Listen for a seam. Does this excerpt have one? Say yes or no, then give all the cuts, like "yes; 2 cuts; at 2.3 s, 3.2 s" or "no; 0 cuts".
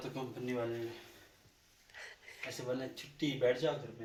no; 0 cuts